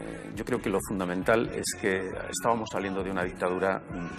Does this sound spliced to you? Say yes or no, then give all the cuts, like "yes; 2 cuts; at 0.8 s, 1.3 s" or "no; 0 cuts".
no; 0 cuts